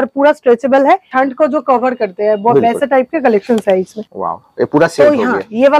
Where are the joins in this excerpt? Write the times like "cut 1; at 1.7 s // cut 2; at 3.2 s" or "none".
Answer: cut 1; at 1.1 s // cut 2; at 4.0 s